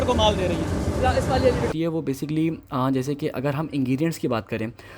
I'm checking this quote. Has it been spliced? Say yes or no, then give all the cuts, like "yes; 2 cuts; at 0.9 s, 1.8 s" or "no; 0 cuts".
yes; 1 cut; at 1.7 s